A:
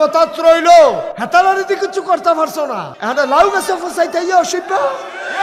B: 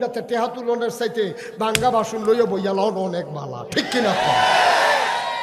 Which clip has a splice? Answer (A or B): A